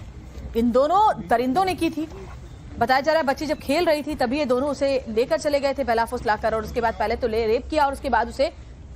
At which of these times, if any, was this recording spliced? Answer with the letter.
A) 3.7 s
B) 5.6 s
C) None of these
A